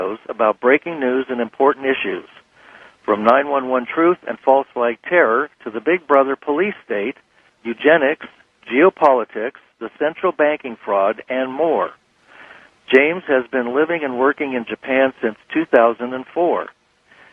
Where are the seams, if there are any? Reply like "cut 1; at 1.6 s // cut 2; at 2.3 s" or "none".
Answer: none